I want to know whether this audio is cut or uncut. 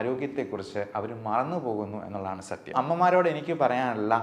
cut